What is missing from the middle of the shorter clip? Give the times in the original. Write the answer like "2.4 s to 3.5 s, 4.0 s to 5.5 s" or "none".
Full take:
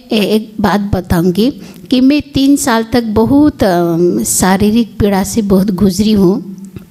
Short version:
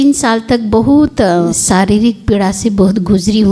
3.7 s to 3.9 s